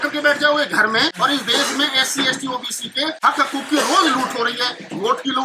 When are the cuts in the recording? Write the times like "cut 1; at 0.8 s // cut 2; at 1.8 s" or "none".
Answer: cut 1; at 1.1 s // cut 2; at 3.2 s